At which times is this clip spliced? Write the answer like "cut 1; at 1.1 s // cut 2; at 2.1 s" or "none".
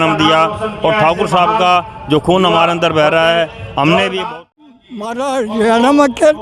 cut 1; at 4.5 s